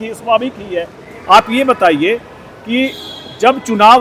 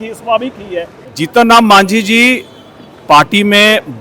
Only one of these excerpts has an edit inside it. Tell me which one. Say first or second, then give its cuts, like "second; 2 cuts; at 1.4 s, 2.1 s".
second; 1 cut; at 1.0 s